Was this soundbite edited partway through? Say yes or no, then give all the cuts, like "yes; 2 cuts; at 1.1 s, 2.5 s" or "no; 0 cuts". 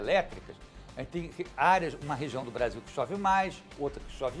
no; 0 cuts